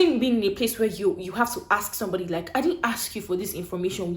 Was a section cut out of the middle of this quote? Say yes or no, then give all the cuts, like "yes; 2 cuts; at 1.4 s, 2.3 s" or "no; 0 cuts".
no; 0 cuts